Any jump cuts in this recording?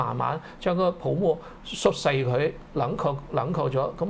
no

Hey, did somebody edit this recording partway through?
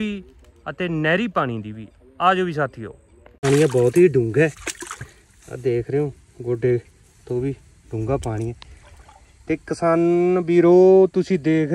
yes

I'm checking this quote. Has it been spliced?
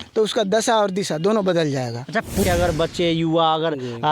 yes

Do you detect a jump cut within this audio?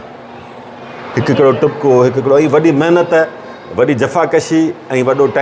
no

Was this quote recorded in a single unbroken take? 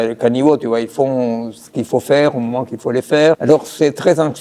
no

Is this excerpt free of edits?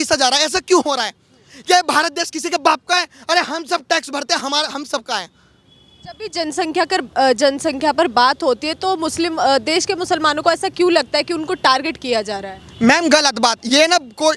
yes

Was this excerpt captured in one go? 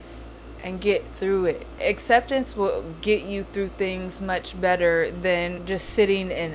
no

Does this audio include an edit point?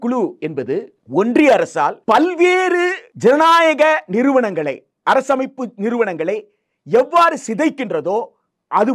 yes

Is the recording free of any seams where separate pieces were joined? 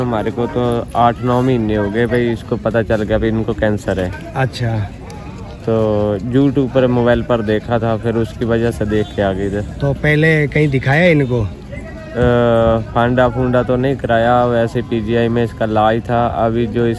yes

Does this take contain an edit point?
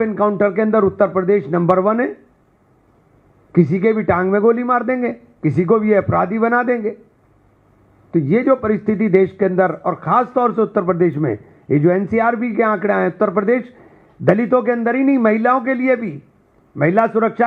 no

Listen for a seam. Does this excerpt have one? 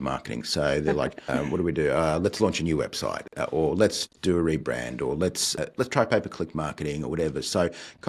yes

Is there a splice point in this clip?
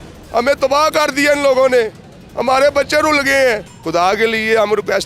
yes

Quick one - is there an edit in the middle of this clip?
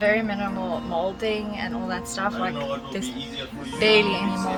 no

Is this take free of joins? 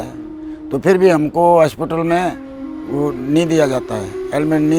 yes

